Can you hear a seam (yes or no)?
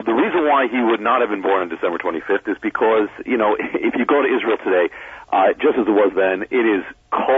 no